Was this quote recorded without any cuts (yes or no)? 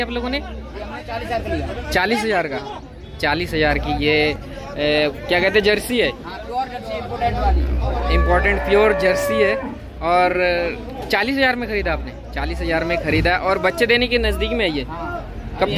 yes